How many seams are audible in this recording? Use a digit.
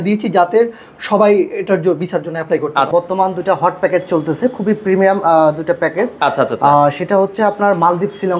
1